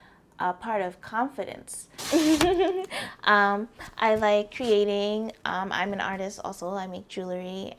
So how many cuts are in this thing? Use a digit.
1